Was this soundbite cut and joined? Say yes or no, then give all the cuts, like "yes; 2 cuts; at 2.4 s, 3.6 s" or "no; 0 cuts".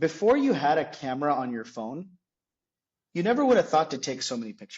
no; 0 cuts